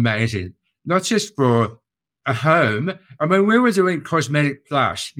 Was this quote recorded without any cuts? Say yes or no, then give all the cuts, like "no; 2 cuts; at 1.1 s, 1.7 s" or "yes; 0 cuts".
yes; 0 cuts